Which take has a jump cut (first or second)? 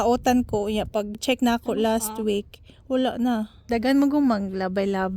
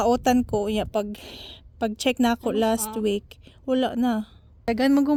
first